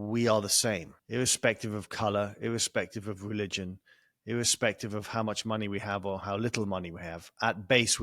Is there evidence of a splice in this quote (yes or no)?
yes